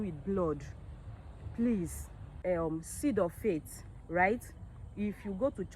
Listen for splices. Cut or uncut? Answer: cut